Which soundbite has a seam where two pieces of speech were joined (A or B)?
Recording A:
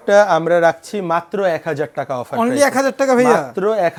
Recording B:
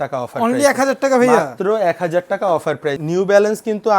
B